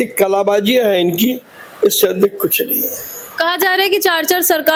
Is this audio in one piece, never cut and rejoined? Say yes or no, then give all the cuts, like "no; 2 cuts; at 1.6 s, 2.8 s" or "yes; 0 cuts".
yes; 0 cuts